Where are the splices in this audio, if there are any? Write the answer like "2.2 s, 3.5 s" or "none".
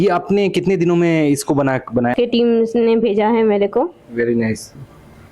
2.1 s